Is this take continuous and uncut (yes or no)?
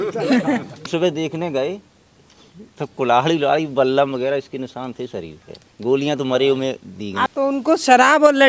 no